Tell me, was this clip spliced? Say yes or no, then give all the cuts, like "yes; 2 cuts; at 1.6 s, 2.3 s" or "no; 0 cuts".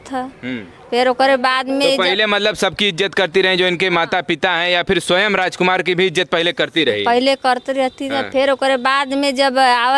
no; 0 cuts